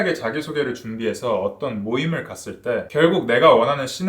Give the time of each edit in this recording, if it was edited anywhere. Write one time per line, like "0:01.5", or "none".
0:02.9

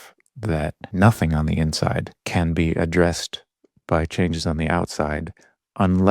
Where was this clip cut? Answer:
0:00.8
0:02.1

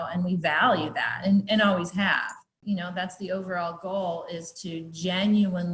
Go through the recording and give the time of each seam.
0:02.5

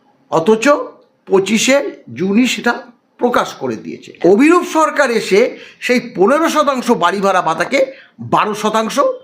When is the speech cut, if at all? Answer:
0:04.1

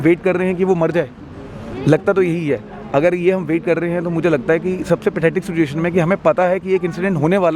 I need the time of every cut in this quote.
none

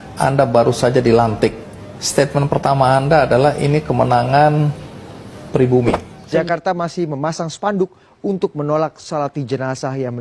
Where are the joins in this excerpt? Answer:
0:06.1

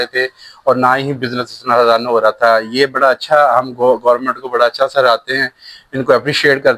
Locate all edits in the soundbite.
none

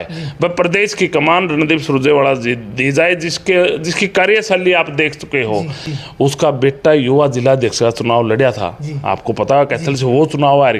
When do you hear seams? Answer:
0:06.3

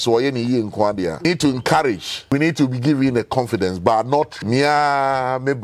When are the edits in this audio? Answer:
0:01.2
0:02.3
0:04.3

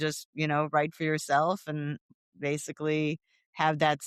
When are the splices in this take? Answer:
0:02.2

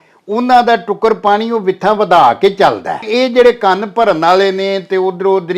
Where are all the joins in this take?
0:03.0

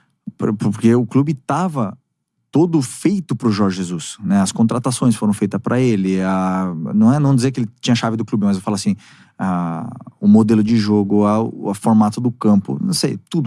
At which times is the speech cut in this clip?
none

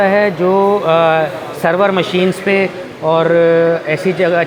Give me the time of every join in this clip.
none

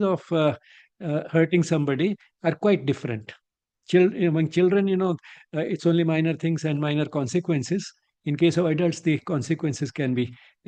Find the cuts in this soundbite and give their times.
none

